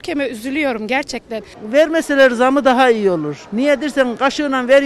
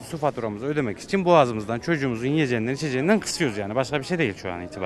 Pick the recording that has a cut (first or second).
first